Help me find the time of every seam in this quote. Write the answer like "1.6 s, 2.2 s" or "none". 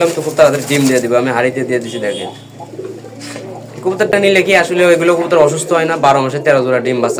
none